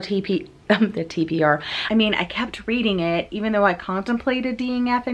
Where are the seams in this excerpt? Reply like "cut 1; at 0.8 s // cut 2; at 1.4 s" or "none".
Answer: cut 1; at 1.7 s